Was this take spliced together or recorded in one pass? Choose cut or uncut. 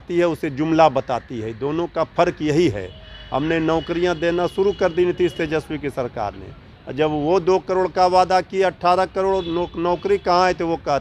uncut